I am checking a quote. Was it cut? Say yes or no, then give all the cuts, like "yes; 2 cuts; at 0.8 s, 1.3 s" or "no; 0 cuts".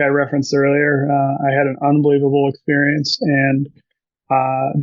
no; 0 cuts